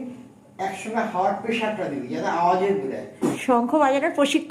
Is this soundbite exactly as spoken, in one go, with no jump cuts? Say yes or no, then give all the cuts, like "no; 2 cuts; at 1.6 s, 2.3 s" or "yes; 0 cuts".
no; 1 cut; at 3.4 s